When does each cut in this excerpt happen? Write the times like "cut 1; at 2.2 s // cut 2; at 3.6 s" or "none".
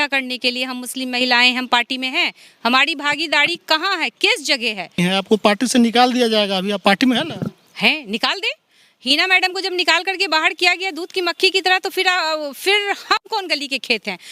cut 1; at 5.0 s